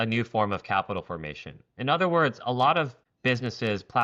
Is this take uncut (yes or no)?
no